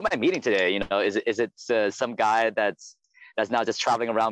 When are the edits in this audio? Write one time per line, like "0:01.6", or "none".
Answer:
0:01.6